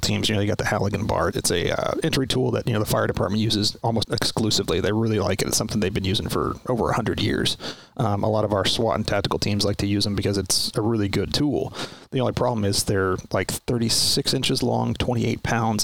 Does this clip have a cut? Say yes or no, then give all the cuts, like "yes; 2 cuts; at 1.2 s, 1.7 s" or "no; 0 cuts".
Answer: yes; 2 cuts; at 1.4 s, 4.0 s